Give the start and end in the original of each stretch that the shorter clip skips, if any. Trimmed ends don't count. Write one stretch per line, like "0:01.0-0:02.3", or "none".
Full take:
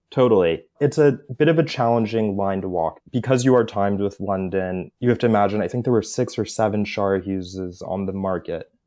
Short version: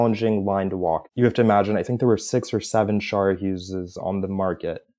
0:03.0-0:04.9